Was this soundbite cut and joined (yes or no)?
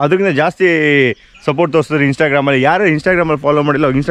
no